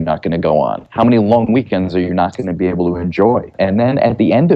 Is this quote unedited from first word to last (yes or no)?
no